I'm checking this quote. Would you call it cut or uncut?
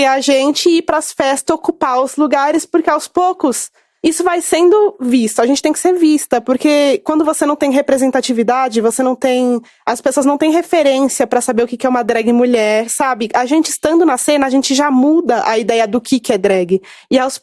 uncut